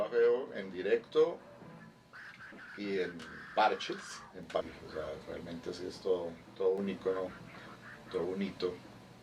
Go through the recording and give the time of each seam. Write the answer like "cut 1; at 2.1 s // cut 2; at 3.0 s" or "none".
cut 1; at 4.6 s